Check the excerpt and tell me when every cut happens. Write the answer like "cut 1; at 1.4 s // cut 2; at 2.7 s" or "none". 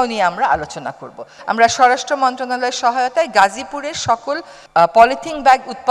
cut 1; at 1.4 s // cut 2; at 4.5 s